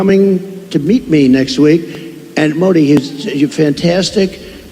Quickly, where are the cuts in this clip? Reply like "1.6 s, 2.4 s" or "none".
none